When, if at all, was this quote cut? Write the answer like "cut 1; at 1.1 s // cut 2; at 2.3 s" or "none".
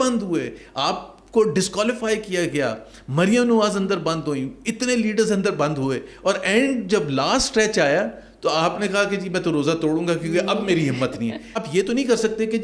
cut 1; at 11.6 s